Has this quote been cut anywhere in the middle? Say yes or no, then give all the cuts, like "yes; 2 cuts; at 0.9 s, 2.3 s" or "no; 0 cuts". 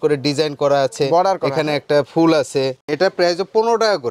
yes; 1 cut; at 2.9 s